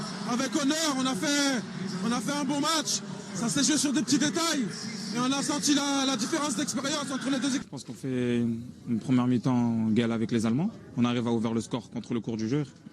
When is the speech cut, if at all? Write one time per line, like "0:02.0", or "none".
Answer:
0:07.6